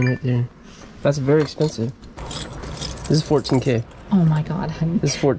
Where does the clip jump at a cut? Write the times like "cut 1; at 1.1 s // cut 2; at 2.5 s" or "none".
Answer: cut 1; at 2.1 s

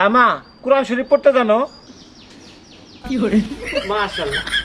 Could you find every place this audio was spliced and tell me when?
none

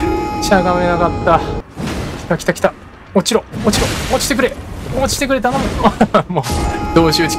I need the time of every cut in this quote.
cut 1; at 1.6 s

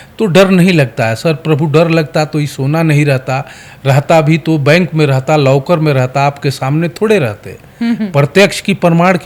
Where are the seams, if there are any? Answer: none

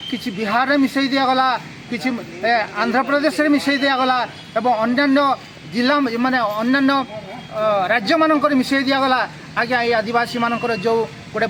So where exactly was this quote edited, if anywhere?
none

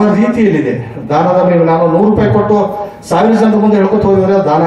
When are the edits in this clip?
none

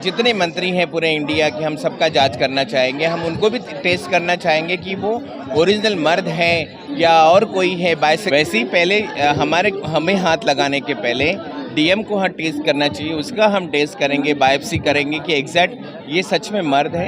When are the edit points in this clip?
cut 1; at 8.2 s

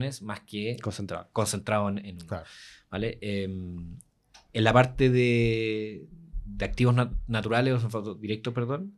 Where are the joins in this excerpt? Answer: none

